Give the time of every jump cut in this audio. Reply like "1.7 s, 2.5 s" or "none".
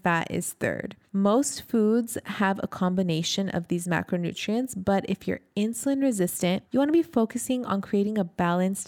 0.9 s, 6.6 s